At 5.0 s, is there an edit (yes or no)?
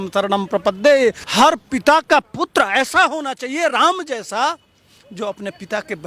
no